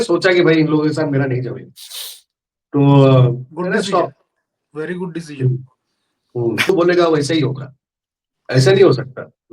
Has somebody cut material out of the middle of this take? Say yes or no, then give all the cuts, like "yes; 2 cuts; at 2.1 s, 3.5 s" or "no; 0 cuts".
yes; 1 cut; at 6.7 s